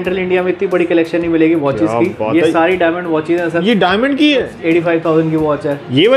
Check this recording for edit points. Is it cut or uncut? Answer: cut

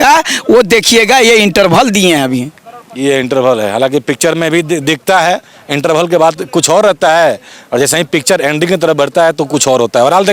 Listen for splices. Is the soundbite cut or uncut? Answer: uncut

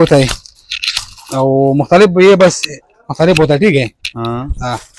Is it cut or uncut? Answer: uncut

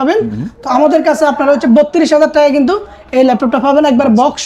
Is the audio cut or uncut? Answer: uncut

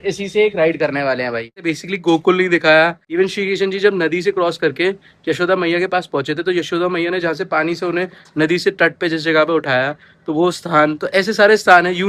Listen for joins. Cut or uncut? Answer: cut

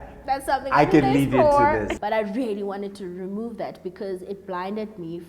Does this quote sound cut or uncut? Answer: cut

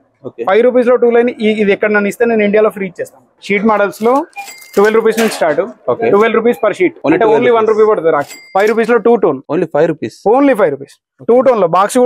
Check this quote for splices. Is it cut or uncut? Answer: cut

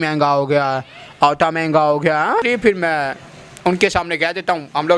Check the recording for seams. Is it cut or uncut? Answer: cut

